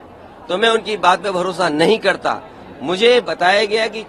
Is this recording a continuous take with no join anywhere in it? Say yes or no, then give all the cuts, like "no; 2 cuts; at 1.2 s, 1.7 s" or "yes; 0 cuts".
yes; 0 cuts